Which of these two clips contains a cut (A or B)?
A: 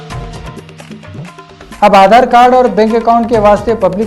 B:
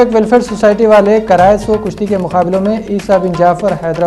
A